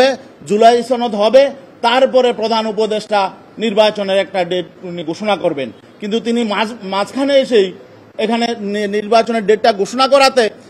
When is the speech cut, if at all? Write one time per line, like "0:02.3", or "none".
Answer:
none